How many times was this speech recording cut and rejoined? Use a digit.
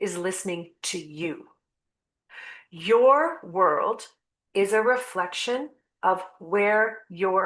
0